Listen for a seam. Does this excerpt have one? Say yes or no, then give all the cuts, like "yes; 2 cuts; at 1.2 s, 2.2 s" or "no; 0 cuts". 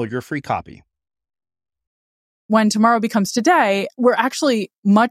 yes; 2 cuts; at 2.5 s, 3.9 s